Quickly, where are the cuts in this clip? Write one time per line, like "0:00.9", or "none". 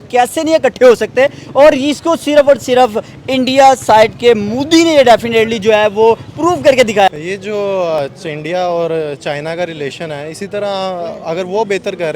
0:07.1